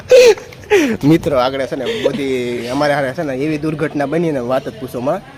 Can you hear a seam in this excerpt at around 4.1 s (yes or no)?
no